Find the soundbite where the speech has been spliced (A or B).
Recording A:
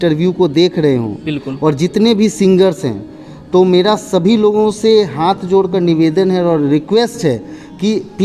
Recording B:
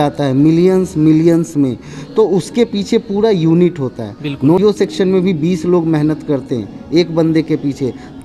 B